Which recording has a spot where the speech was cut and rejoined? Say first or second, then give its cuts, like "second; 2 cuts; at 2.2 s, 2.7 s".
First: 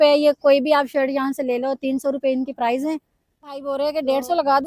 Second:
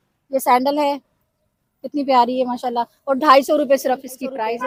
first; 1 cut; at 3.7 s